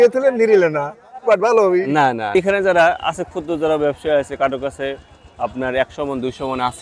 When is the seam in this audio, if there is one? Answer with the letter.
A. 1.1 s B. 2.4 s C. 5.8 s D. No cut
B